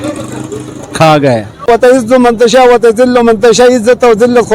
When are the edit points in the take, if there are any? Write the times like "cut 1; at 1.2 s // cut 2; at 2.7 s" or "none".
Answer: cut 1; at 1.7 s

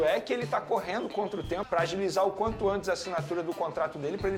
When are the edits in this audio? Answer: cut 1; at 1.6 s

